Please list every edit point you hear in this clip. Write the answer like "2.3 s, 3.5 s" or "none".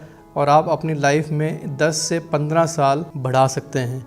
3.1 s